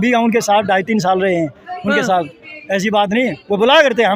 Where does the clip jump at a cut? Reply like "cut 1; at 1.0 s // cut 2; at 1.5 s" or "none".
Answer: none